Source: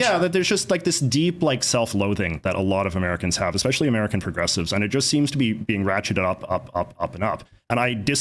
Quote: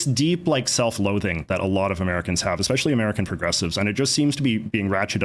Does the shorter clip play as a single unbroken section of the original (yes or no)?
yes